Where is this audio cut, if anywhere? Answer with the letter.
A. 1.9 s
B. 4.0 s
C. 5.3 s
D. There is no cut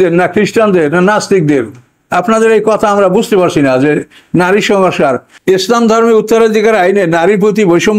C